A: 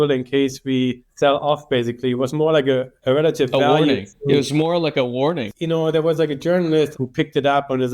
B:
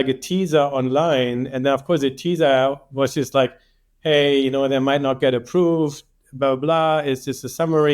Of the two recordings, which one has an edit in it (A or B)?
A